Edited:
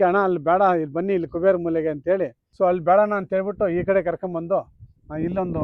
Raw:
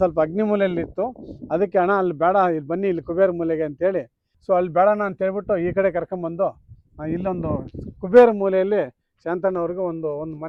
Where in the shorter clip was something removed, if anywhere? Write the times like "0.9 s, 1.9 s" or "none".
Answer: 2.4 s